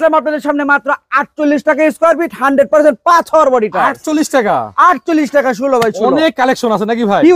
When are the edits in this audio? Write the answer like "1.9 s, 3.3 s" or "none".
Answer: none